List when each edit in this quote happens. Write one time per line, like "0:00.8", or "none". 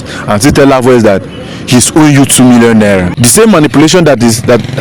0:03.1